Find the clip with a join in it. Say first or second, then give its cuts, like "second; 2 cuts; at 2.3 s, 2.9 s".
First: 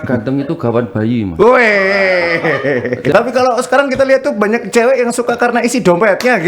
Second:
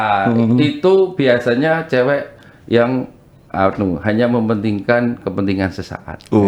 first; 1 cut; at 3.1 s